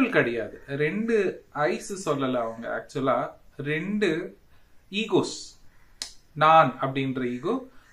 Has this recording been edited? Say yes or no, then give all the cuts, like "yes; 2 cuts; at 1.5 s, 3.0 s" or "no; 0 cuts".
no; 0 cuts